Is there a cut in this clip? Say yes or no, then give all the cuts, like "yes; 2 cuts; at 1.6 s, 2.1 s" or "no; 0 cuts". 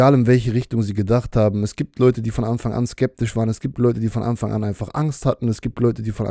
no; 0 cuts